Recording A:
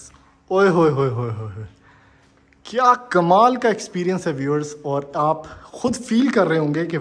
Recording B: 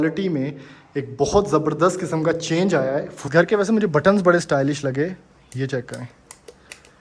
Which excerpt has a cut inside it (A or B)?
B